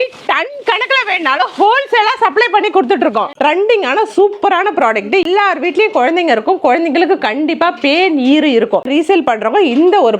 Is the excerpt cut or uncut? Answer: cut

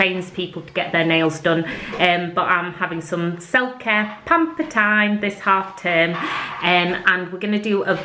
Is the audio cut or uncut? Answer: uncut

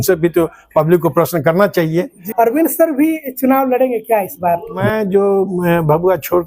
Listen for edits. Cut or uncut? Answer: cut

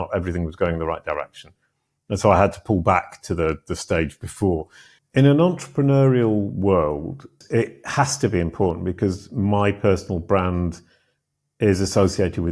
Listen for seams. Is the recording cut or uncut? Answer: cut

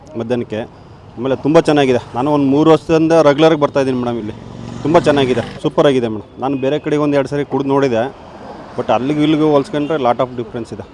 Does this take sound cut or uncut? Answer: uncut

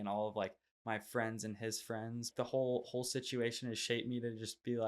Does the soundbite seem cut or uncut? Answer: cut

